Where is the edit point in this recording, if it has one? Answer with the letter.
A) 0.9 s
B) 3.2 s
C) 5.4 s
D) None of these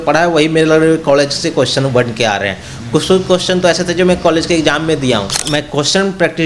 C